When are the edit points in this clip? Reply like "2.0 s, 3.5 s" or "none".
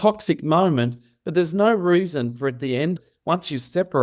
none